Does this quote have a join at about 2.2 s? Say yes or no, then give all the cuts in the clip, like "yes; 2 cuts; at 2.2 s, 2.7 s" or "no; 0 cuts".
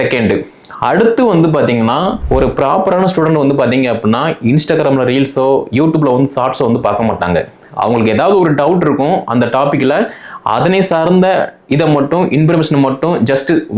yes; 1 cut; at 2.2 s